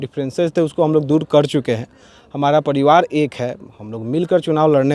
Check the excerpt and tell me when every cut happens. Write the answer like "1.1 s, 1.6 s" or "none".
none